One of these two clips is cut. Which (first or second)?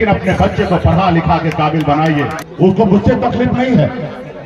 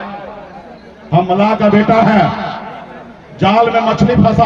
first